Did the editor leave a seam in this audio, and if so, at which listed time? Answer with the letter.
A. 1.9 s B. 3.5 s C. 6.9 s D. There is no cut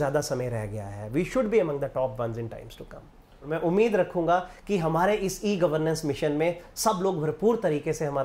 B